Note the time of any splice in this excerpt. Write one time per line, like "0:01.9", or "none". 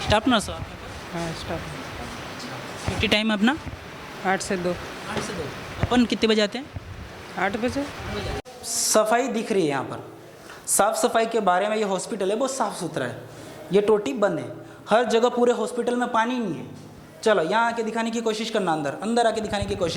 0:08.5